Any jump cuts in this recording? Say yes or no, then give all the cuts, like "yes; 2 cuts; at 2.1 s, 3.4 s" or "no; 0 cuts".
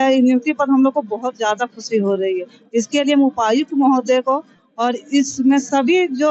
no; 0 cuts